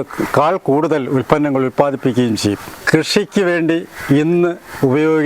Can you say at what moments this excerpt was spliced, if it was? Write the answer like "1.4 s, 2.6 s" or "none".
2.7 s